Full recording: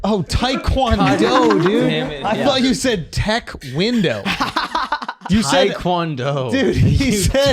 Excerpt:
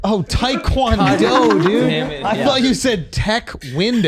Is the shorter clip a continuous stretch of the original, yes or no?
yes